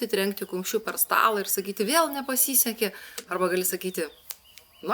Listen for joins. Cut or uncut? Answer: uncut